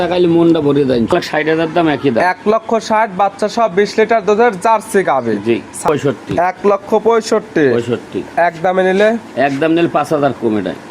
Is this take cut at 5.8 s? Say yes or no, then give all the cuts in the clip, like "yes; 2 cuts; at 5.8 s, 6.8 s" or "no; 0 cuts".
yes; 2 cuts; at 1.1 s, 5.8 s